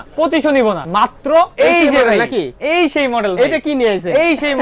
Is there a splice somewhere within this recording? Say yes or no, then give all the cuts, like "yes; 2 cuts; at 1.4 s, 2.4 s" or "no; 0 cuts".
yes; 1 cut; at 1.2 s